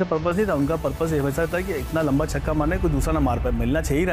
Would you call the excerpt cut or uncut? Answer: uncut